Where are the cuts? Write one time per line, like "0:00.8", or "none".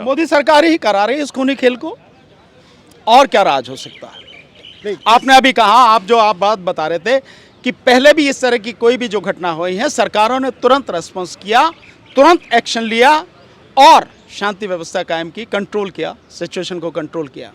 none